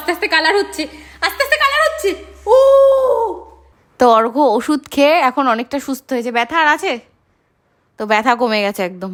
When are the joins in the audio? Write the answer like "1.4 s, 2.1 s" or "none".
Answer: none